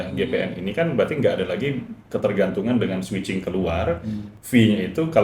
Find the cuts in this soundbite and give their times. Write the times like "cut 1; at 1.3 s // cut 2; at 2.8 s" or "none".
cut 1; at 4.2 s